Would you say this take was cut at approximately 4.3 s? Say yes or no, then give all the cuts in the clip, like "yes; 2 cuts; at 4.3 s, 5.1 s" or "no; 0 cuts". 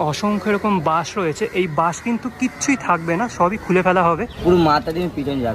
yes; 1 cut; at 4.3 s